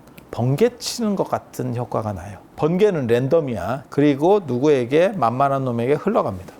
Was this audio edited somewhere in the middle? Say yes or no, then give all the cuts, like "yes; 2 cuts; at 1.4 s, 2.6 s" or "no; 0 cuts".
yes; 2 cuts; at 2.4 s, 3.8 s